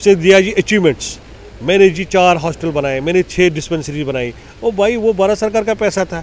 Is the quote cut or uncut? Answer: uncut